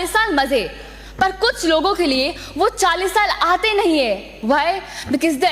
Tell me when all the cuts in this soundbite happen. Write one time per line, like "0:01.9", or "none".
none

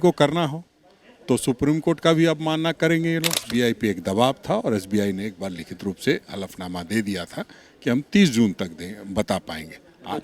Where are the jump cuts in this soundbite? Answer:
0:03.4

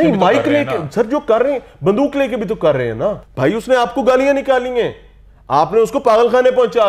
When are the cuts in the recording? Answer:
0:03.3

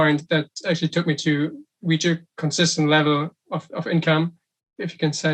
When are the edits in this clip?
none

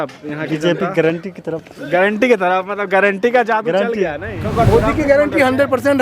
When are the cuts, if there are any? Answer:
0:04.3

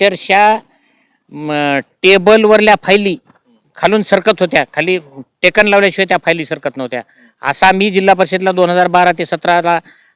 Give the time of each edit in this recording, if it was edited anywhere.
none

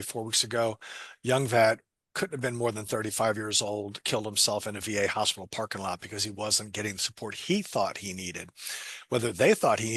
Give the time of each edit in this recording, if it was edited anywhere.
none

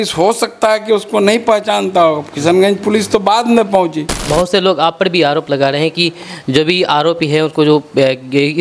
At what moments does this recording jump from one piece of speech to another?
0:04.2

